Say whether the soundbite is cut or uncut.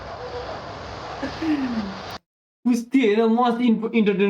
cut